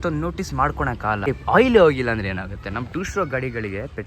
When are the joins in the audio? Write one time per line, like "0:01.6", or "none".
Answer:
0:01.3